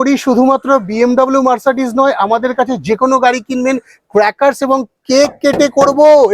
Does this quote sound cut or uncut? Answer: uncut